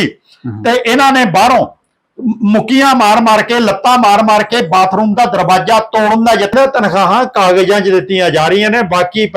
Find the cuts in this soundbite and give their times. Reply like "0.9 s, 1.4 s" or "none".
6.5 s